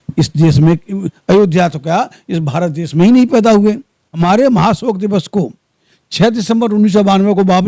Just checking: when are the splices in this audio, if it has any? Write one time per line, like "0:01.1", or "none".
0:04.2